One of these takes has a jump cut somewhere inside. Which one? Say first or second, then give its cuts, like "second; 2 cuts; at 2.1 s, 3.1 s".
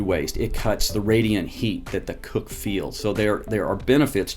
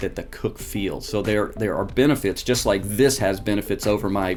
first; 1 cut; at 0.9 s